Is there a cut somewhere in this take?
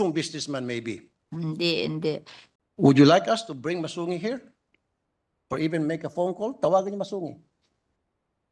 yes; 1 cut; at 2.4 s

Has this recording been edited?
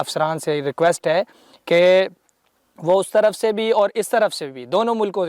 no; 0 cuts

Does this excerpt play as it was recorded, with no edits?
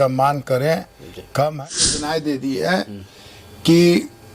no; 1 cut; at 1.9 s

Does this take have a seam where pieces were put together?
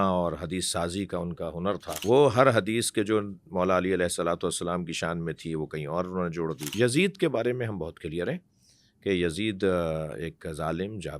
yes; 2 cuts; at 2.0 s, 6.7 s

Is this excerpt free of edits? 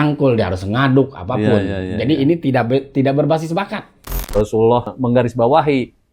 no; 2 cuts; at 4.1 s, 4.9 s

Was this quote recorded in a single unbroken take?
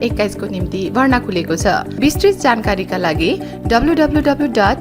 no; 1 cut; at 1.9 s

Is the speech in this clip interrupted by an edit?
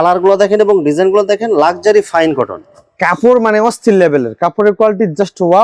no; 0 cuts

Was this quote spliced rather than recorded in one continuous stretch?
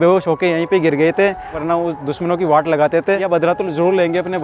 yes; 2 cuts; at 1.6 s, 3.3 s

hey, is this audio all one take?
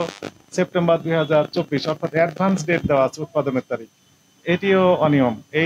yes; 0 cuts

